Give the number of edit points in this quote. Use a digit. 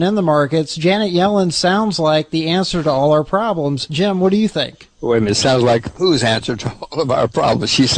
0